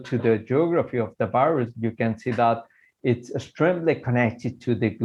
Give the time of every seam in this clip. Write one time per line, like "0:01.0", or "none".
none